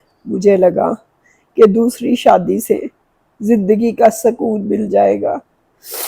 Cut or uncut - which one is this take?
uncut